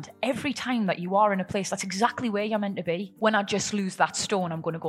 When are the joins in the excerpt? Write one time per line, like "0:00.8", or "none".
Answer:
0:03.1